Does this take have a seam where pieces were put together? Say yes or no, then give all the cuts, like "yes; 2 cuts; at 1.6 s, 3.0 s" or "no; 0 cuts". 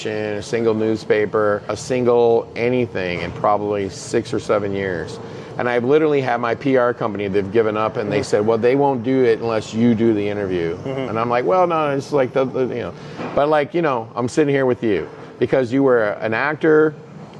yes; 1 cut; at 1.8 s